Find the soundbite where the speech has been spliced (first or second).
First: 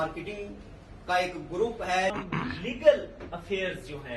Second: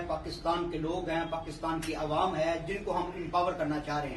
first